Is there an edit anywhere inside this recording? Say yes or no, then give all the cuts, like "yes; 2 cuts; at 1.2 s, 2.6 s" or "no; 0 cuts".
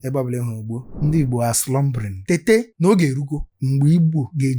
yes; 2 cuts; at 0.9 s, 2.2 s